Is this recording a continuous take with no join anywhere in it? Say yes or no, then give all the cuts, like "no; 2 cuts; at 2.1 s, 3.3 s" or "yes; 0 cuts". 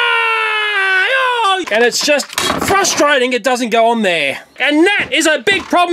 no; 2 cuts; at 1.7 s, 4.6 s